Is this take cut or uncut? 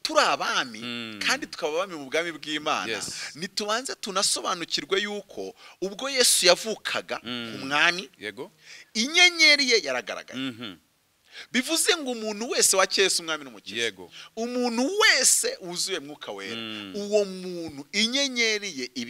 uncut